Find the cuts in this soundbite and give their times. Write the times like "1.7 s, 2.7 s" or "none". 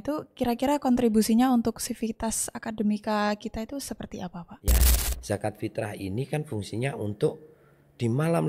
4.9 s